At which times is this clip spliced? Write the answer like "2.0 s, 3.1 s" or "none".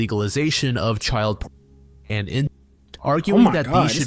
none